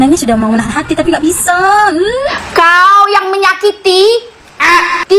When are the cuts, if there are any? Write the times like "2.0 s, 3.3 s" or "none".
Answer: 2.4 s